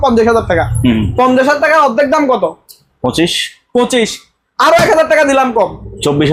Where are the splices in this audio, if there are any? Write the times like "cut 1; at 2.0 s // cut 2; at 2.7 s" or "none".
none